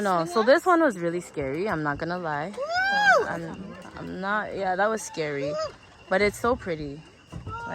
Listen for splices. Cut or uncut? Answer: uncut